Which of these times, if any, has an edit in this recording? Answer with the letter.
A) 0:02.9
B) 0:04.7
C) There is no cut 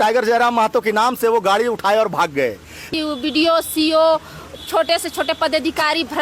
A